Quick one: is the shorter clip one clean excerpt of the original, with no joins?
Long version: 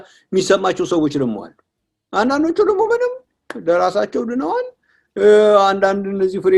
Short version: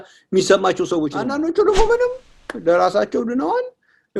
no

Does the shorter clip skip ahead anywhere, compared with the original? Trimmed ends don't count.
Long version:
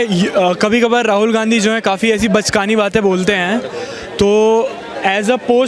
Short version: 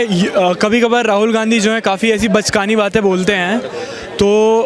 no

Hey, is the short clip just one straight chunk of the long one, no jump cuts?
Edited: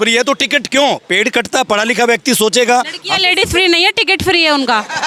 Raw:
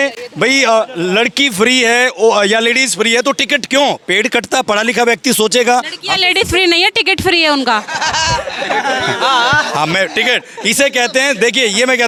yes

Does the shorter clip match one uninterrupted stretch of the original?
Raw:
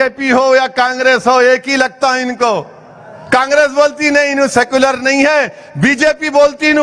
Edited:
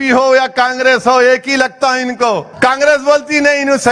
no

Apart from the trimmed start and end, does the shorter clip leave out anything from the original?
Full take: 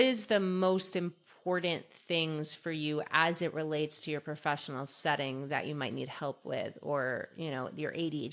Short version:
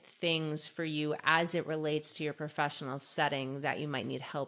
no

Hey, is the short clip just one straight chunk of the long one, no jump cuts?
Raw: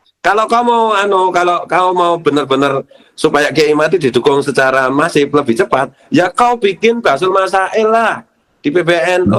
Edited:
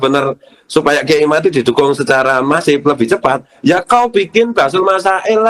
yes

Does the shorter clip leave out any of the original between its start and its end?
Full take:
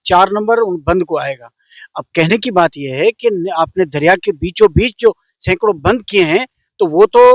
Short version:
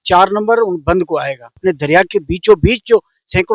yes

